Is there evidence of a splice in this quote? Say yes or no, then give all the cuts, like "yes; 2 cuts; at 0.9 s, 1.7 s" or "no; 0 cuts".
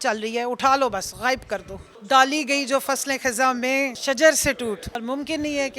yes; 3 cuts; at 1.9 s, 4.0 s, 5.0 s